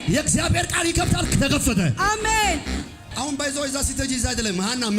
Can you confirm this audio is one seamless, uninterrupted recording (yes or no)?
no